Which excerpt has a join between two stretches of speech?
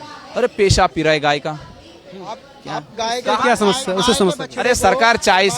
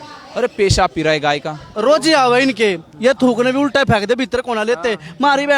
second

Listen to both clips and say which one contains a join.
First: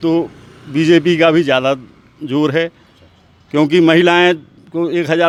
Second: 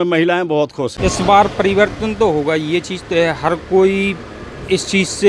second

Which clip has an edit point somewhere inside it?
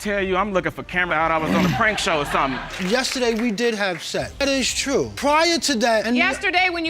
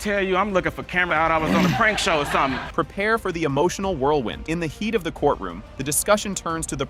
first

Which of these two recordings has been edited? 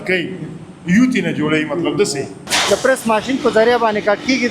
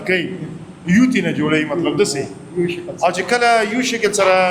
first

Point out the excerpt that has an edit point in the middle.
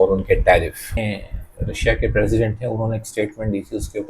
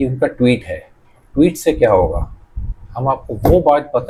first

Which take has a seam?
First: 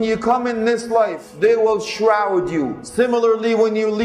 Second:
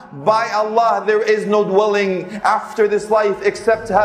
first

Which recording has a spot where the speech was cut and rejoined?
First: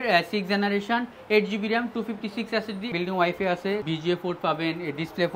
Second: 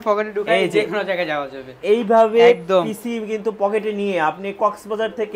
first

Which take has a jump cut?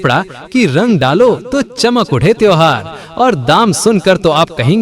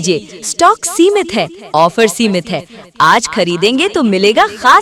first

